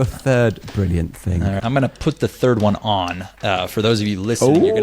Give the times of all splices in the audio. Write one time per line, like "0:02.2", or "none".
0:01.6